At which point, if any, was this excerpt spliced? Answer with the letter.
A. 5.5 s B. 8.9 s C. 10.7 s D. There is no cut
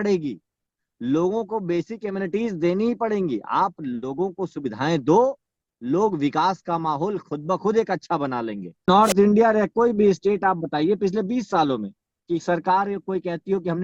B